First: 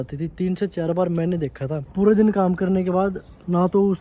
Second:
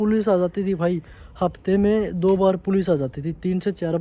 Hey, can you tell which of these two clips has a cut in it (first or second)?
first